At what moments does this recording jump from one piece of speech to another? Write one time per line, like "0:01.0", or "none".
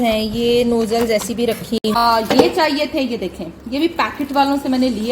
0:01.6